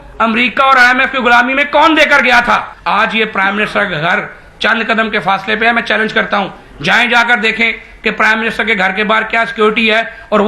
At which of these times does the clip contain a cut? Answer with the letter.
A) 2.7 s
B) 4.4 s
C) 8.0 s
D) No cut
A